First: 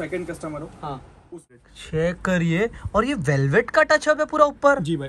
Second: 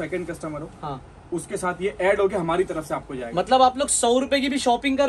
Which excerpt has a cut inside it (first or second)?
first